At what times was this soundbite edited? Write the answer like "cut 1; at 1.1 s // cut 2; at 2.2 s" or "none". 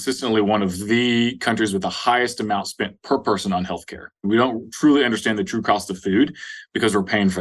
cut 1; at 4.3 s